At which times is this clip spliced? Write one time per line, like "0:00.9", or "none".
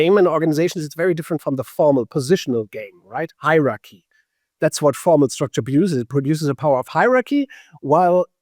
none